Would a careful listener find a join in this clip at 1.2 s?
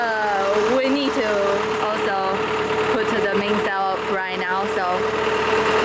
no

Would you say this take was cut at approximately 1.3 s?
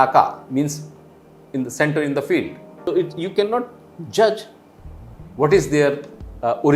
no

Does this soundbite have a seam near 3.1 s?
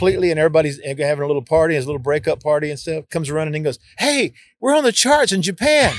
yes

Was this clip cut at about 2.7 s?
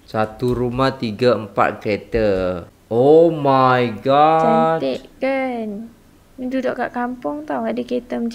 yes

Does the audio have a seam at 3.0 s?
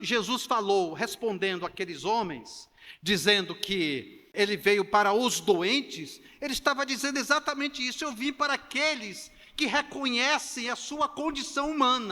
no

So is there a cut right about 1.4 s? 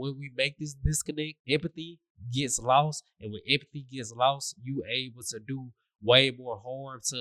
yes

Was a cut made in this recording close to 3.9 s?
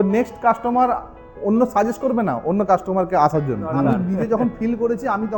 yes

